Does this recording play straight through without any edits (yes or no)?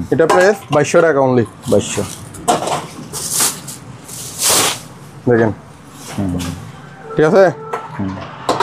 yes